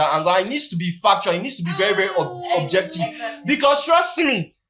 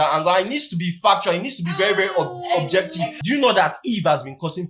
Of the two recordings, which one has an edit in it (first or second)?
second